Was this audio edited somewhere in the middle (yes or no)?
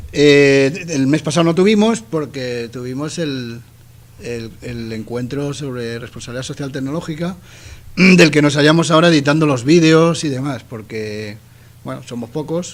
no